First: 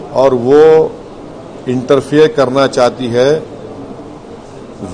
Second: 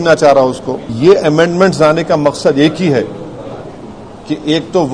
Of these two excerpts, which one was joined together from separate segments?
second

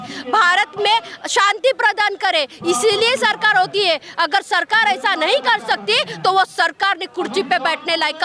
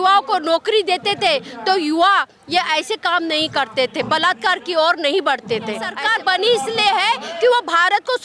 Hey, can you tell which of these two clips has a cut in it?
second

